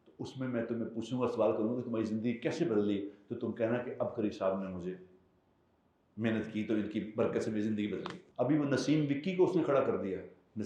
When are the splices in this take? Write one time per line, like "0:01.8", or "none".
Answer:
0:08.2